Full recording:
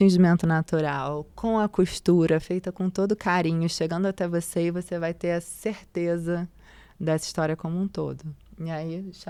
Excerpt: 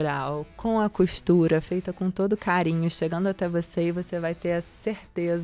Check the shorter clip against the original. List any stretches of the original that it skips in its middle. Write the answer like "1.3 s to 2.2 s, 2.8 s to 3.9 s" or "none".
none